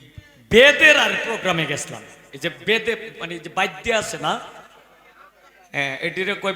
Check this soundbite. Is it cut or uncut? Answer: uncut